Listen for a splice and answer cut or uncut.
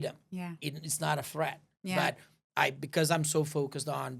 uncut